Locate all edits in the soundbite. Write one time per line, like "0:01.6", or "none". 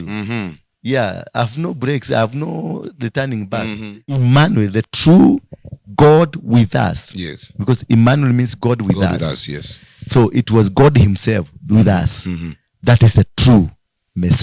0:04.2